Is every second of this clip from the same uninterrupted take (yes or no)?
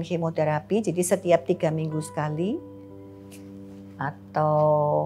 yes